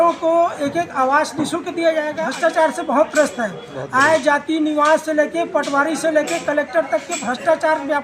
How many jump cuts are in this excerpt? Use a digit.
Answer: 1